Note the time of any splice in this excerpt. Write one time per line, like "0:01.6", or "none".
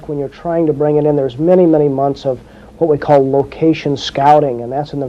none